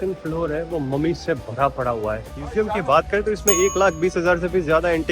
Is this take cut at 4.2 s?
no; 1 cut; at 2.4 s

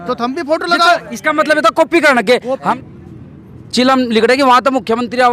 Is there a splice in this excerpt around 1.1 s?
no; 1 cut; at 2.7 s

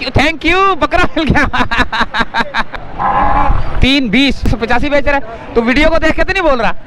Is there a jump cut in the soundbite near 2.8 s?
yes; 2 cuts; at 2.8 s, 4.5 s

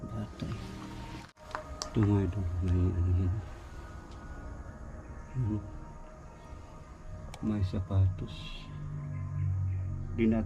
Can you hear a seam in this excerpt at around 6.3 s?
no; 1 cut; at 1.4 s

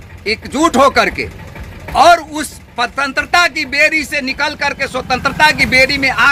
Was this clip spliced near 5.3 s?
no; 0 cuts

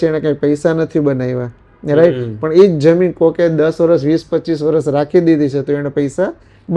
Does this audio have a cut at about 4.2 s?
no; 0 cuts

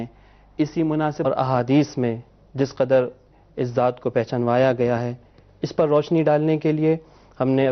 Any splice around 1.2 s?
no; 0 cuts

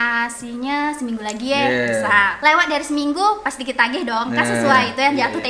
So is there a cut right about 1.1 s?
no; 1 cut; at 2.3 s

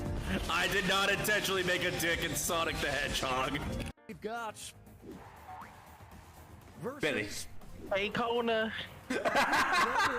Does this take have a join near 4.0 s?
yes; 1 cut; at 4.0 s

